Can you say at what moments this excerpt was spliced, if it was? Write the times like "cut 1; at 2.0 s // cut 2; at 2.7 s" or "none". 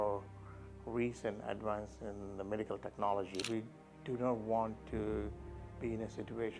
cut 1; at 3.4 s